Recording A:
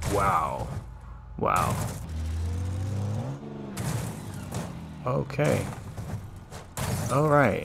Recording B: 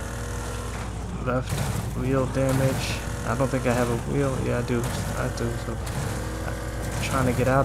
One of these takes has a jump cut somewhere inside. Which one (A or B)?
A